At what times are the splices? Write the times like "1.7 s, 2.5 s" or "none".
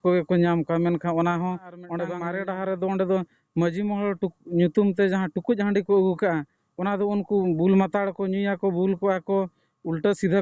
2.1 s